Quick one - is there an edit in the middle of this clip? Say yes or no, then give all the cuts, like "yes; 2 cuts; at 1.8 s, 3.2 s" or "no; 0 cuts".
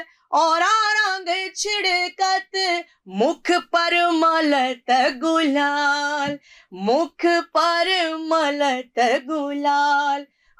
no; 0 cuts